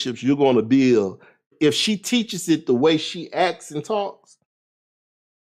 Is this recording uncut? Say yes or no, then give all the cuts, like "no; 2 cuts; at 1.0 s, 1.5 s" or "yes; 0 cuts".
no; 1 cut; at 1.5 s